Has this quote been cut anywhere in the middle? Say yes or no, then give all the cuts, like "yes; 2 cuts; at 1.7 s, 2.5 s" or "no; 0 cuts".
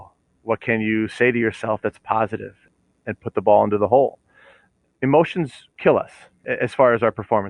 yes; 4 cuts; at 2.6 s, 4.6 s, 5.6 s, 6.4 s